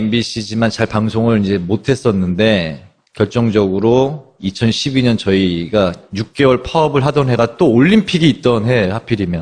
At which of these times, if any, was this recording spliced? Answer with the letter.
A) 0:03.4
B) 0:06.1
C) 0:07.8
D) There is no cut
C